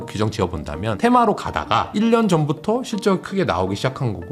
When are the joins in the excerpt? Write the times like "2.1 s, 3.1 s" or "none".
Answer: 0.9 s